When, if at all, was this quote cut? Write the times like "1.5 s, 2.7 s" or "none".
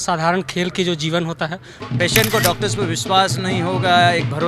1.7 s